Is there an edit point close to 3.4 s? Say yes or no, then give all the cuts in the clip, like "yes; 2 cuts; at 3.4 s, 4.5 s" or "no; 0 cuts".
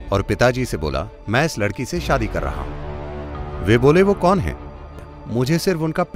no; 1 cut; at 5.1 s